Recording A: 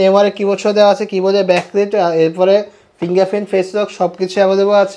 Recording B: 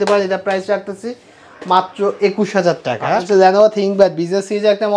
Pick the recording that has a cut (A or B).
B